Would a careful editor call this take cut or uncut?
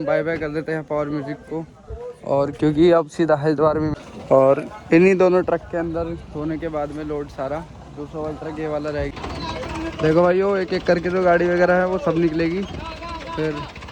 cut